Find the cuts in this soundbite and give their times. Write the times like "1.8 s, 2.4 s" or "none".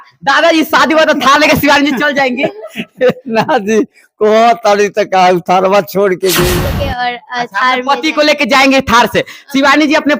6.5 s